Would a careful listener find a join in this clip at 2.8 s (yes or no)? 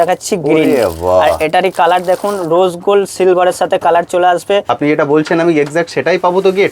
no